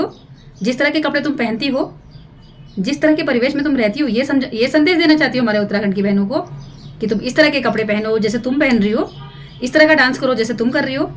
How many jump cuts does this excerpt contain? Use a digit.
0